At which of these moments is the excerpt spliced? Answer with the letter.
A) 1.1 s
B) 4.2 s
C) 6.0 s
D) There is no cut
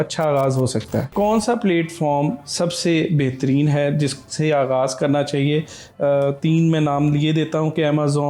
A